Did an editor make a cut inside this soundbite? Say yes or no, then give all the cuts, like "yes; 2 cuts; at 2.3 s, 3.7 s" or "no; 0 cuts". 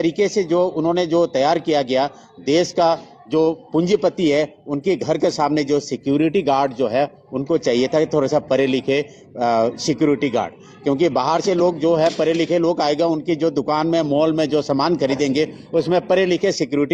no; 0 cuts